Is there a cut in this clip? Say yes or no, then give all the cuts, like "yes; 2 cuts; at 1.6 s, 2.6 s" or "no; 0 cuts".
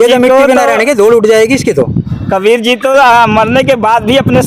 no; 0 cuts